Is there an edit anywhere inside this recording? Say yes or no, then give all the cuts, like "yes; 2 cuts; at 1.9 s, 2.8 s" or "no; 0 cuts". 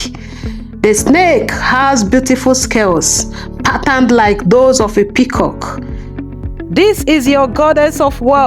yes; 1 cut; at 6.2 s